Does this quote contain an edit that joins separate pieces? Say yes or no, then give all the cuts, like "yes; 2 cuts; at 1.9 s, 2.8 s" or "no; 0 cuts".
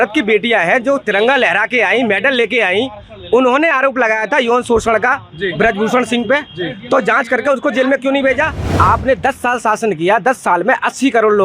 yes; 1 cut; at 8.7 s